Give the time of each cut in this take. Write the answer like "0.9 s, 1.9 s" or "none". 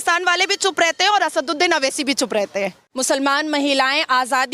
2.9 s